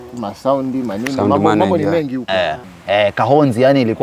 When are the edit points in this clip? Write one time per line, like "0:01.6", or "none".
0:02.6

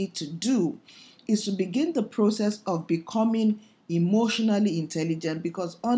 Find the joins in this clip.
none

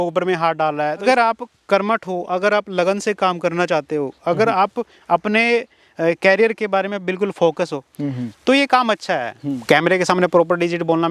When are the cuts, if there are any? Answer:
0:01.0
0:09.5

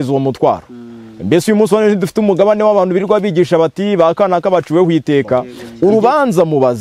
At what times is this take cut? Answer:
0:05.6

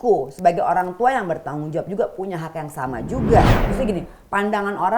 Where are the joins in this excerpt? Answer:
0:03.5

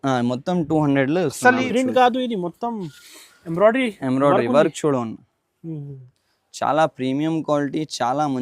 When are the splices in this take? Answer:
0:01.6

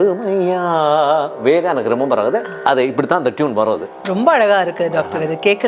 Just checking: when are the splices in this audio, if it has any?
none

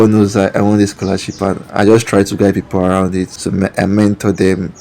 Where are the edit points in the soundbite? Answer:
0:03.4

